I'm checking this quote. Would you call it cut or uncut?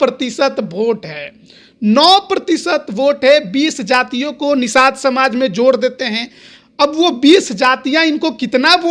uncut